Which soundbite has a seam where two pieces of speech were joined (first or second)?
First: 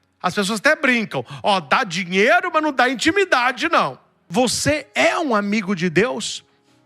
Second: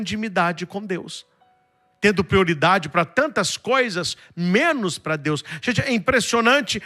first